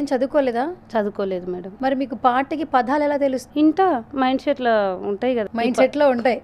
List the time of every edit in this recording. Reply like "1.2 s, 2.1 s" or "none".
1.7 s, 3.4 s, 5.4 s